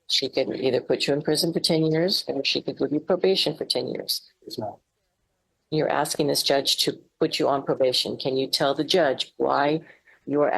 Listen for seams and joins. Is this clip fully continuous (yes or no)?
yes